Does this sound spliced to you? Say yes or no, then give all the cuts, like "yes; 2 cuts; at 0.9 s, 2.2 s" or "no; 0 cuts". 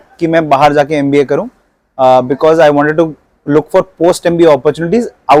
no; 0 cuts